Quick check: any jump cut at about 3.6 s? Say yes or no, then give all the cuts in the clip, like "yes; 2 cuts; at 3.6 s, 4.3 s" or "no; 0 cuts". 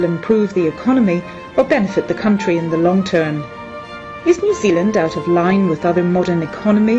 no; 0 cuts